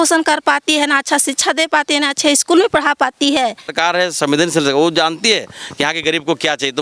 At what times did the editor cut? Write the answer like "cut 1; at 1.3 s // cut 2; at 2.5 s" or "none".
cut 1; at 3.7 s